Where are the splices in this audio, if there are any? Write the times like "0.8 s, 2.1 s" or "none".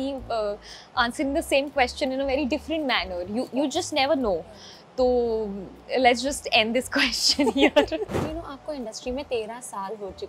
8.3 s